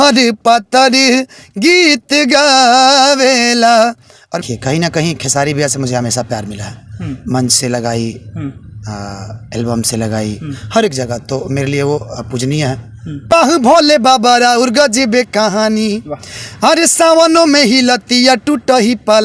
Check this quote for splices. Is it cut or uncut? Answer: cut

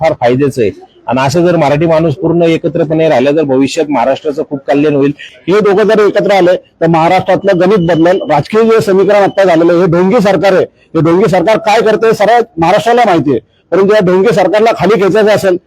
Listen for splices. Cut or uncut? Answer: cut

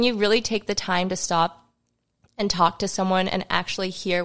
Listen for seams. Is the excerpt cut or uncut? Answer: uncut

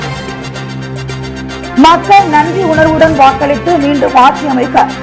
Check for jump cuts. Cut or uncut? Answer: cut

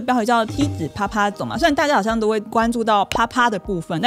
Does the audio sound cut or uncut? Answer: uncut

